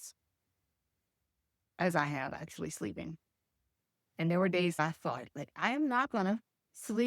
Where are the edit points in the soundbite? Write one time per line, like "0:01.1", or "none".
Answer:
0:04.8